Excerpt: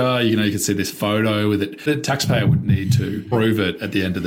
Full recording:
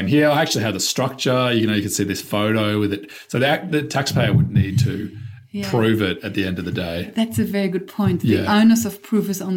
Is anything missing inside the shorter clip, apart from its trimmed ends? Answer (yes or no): yes